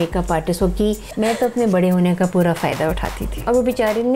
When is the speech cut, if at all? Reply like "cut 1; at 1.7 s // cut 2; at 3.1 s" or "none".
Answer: cut 1; at 1.1 s // cut 2; at 3.3 s